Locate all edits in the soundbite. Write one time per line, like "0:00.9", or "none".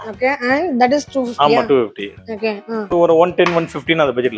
0:02.9